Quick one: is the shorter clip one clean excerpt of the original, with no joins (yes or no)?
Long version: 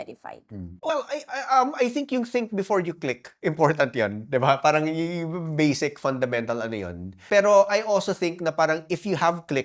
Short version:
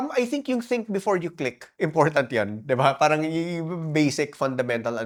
yes